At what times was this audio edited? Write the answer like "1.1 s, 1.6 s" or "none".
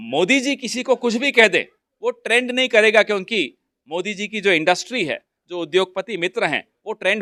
none